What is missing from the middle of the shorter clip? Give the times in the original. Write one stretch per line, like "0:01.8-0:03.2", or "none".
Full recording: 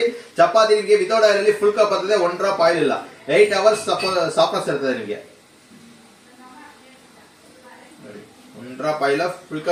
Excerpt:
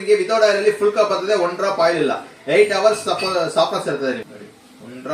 0:05.0-0:08.0

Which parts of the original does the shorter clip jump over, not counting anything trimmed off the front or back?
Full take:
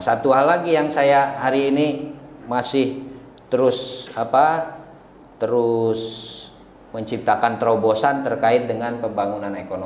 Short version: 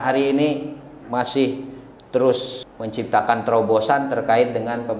0:04.0-0:06.7

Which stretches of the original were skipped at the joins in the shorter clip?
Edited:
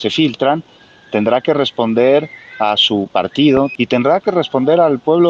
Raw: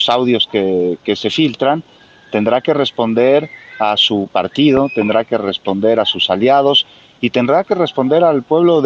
0:04.9-0:07.1

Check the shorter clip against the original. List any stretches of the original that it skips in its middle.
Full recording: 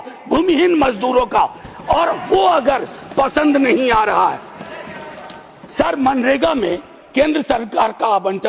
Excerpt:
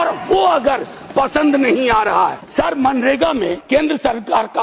0:04.4-0:05.6
0:06.8-0:07.0

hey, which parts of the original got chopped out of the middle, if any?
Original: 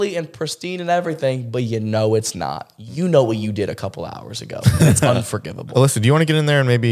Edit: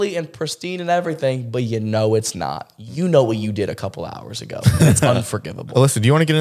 none

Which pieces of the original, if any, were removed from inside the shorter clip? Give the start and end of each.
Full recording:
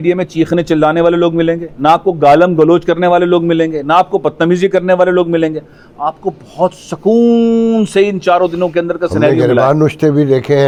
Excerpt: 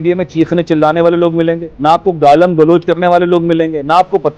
none

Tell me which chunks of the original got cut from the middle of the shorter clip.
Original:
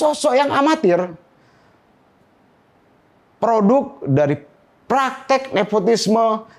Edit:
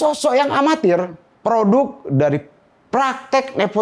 0:01.2-0:03.2

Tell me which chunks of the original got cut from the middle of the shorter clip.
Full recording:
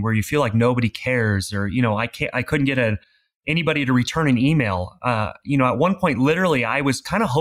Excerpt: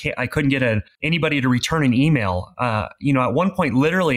0:03.1-0:03.4

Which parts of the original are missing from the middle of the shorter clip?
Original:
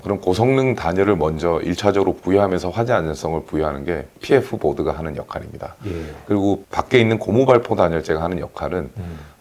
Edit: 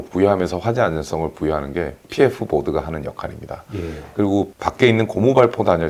none

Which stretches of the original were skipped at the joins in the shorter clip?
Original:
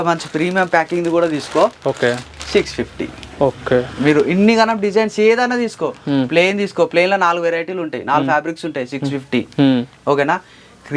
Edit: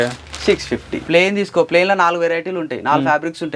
0:03.1-0:06.3

